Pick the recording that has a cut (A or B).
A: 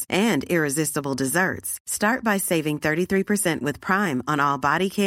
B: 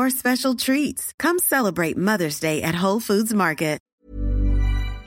B